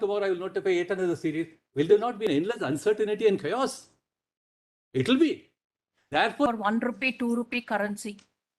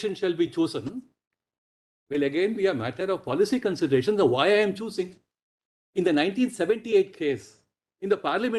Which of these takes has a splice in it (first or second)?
first